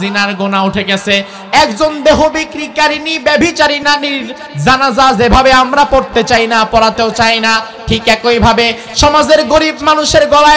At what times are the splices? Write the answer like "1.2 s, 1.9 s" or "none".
1.4 s, 3.8 s